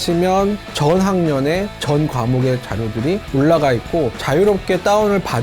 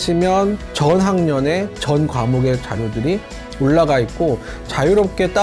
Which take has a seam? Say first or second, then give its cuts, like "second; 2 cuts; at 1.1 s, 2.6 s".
first; 2 cuts; at 3.2 s, 4.2 s